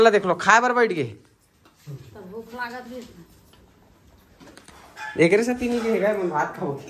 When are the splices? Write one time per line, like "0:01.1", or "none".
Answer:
none